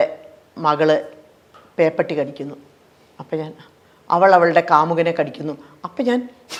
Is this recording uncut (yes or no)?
yes